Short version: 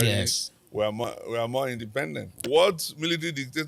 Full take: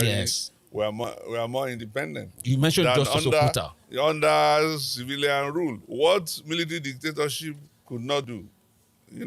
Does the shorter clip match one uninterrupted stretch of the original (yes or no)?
no